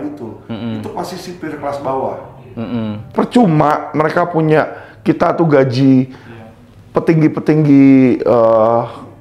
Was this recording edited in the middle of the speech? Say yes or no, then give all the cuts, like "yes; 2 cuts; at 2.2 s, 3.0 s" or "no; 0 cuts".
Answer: yes; 1 cut; at 3.1 s